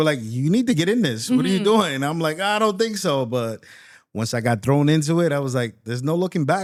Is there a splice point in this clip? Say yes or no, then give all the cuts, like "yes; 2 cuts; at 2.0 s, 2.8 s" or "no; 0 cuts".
no; 0 cuts